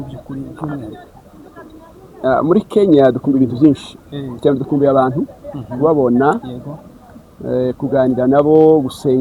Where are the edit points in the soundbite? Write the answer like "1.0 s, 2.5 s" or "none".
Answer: none